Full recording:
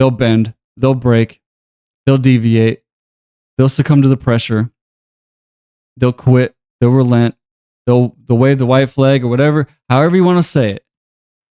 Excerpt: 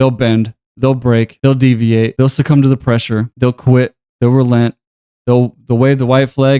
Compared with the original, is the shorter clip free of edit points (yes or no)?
no